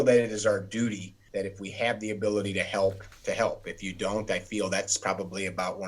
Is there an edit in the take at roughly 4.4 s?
no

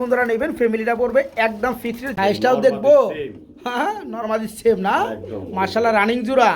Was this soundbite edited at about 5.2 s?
no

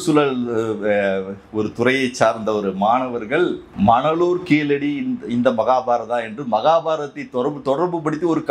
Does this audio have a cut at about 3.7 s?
yes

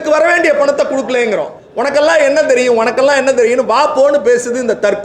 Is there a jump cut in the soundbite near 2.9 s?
no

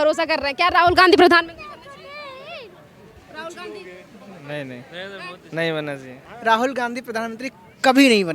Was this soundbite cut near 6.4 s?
yes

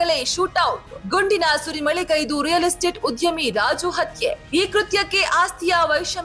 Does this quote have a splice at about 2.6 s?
no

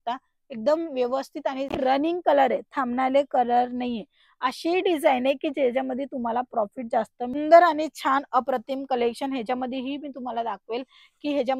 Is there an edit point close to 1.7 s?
yes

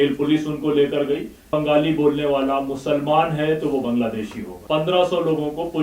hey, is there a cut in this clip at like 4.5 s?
yes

